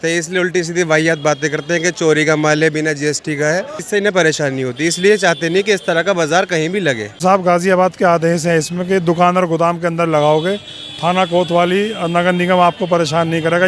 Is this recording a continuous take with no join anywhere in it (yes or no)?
no